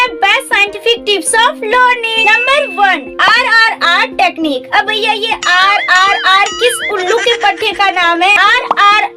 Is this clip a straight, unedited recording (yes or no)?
yes